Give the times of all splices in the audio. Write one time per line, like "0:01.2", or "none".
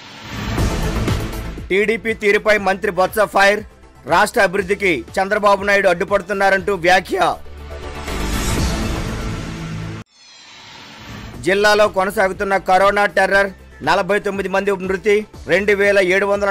0:01.5